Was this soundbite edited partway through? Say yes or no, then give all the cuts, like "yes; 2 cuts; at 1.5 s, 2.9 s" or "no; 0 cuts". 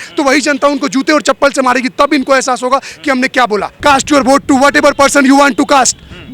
yes; 1 cut; at 3.7 s